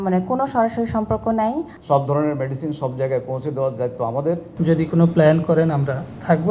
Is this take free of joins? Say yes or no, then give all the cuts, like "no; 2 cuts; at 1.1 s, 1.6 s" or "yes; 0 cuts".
no; 2 cuts; at 1.8 s, 4.5 s